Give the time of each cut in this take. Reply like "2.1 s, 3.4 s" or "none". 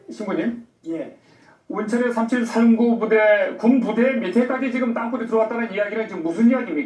4.7 s